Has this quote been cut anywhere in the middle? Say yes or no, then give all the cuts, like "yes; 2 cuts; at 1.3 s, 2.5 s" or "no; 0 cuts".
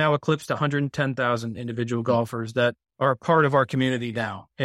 yes; 1 cut; at 2.8 s